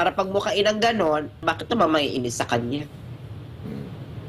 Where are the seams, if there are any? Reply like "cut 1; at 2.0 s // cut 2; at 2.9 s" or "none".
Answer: cut 1; at 1.4 s